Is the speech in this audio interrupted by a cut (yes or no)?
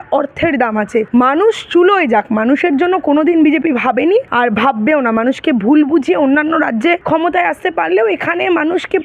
yes